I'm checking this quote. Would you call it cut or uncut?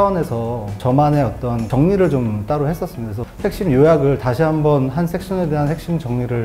cut